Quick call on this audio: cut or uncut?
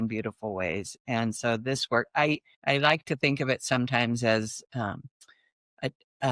cut